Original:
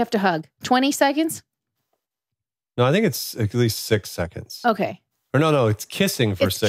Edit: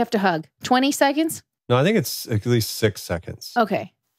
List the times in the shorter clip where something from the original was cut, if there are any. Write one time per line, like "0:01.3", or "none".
0:01.5